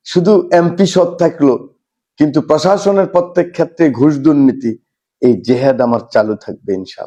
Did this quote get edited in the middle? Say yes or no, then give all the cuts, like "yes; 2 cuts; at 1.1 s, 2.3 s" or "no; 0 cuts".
no; 0 cuts